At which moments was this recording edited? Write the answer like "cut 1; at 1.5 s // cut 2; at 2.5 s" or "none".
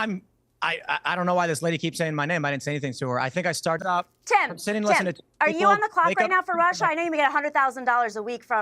cut 1; at 3.8 s